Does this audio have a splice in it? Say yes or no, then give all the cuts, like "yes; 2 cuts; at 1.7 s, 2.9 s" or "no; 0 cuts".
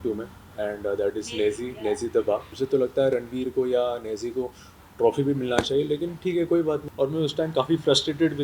yes; 2 cuts; at 2.5 s, 6.9 s